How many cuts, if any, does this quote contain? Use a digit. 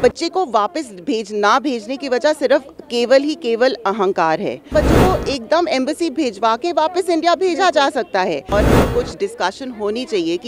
2